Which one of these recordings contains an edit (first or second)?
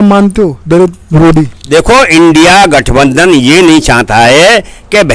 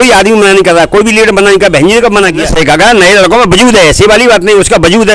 second